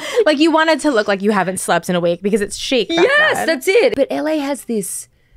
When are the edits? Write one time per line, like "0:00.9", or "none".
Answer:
0:03.9